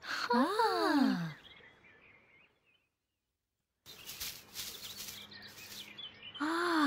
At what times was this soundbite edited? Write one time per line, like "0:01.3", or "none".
0:03.9

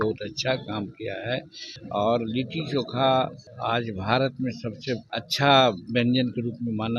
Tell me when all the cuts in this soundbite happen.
0:01.7
0:03.5
0:05.2

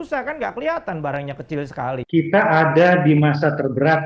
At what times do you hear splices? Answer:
0:02.0

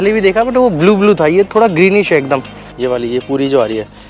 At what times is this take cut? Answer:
0:02.6

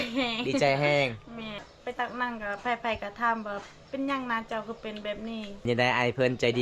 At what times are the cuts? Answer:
0:01.6
0:05.7

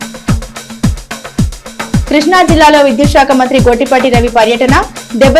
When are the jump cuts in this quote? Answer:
none

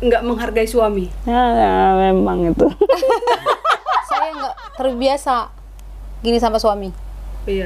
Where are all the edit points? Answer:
0:04.6

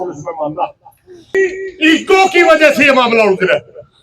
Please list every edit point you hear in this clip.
0:01.3

